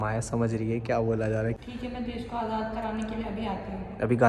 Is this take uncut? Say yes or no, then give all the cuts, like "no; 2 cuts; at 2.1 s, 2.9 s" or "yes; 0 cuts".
no; 1 cut; at 1.6 s